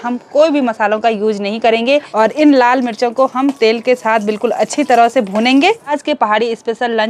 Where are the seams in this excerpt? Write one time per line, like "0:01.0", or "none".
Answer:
0:02.1
0:05.9